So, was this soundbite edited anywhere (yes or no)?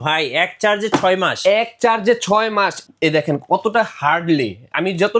yes